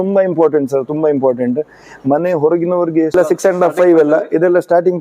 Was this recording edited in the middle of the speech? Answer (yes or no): yes